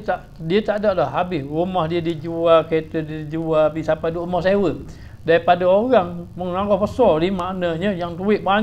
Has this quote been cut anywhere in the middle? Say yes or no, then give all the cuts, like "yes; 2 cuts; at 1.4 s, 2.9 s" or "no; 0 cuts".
no; 0 cuts